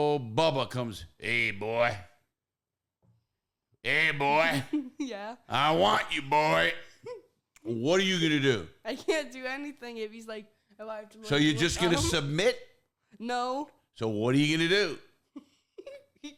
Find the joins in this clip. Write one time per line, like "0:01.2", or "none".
none